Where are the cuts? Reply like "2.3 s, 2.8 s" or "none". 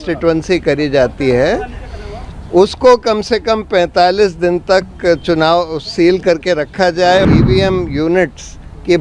7.2 s